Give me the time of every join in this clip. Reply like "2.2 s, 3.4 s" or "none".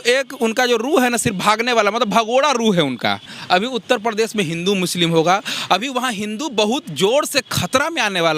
3.3 s